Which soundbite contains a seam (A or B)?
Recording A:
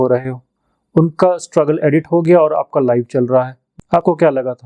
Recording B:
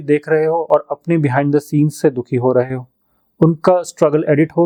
A